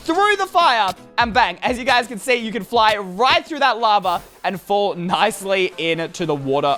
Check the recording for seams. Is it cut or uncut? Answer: uncut